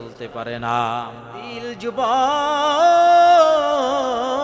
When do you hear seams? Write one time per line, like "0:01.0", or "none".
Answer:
0:01.5